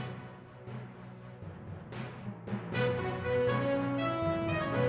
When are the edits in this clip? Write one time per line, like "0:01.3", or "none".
0:02.2